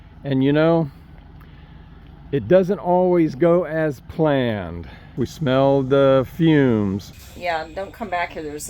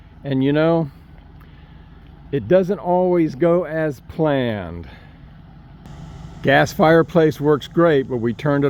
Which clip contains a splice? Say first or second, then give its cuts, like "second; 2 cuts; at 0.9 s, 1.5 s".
first; 2 cuts; at 5.2 s, 7.1 s